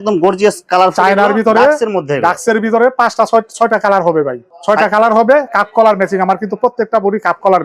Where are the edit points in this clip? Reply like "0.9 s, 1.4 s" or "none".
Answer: none